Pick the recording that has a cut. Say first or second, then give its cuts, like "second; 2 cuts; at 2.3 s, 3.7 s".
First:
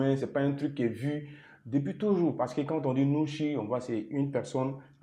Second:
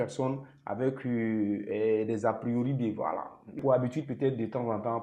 second; 1 cut; at 3.6 s